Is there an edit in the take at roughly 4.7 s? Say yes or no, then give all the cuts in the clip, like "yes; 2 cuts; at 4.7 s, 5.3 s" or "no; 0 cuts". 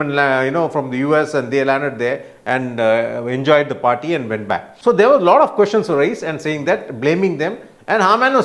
yes; 1 cut; at 4.7 s